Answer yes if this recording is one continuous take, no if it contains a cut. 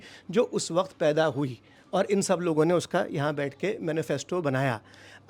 yes